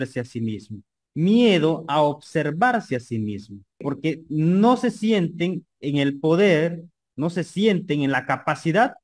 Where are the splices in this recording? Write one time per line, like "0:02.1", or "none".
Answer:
0:03.8